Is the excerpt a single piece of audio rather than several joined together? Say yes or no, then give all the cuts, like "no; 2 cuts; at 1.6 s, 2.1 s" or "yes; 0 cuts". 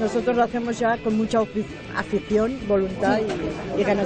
yes; 0 cuts